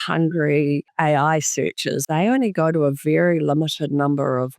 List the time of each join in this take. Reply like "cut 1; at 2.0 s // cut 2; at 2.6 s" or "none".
cut 1; at 0.9 s // cut 2; at 2.0 s